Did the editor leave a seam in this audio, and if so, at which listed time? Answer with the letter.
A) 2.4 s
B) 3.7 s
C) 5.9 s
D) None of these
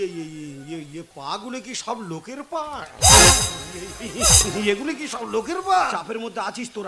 C